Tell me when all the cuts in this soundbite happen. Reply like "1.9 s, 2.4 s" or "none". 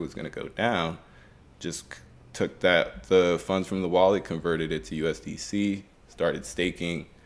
none